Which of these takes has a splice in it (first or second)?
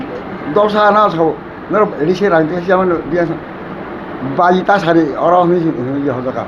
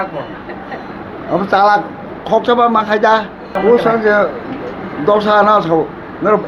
second